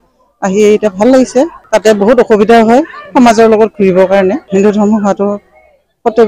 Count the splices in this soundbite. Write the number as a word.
two